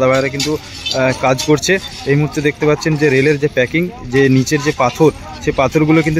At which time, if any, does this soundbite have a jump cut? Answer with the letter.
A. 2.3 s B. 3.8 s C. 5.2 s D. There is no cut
D